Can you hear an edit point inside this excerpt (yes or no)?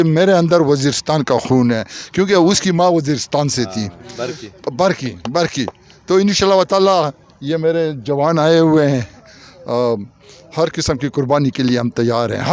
no